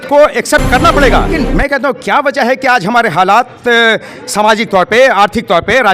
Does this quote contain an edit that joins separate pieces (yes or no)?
yes